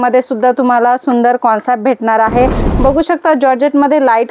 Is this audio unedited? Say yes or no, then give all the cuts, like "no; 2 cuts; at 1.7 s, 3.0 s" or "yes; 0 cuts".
no; 1 cut; at 2.6 s